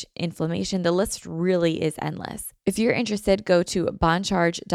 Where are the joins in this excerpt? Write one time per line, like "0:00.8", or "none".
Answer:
0:02.5